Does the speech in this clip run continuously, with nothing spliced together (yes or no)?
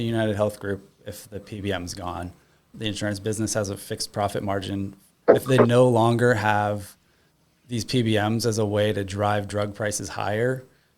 no